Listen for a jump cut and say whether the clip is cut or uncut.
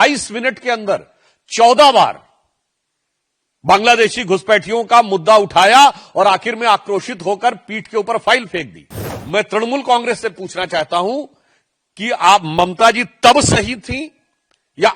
uncut